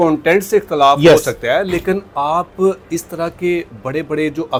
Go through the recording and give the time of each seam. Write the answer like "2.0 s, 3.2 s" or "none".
none